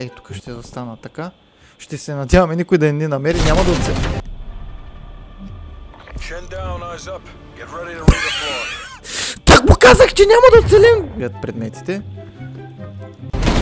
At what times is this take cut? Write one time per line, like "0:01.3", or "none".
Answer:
0:11.1